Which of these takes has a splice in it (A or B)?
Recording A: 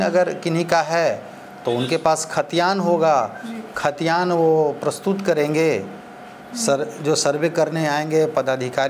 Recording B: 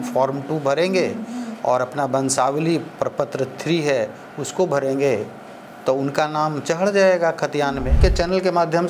B